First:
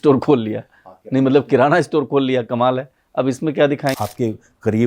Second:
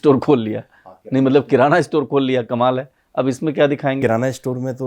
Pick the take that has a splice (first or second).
first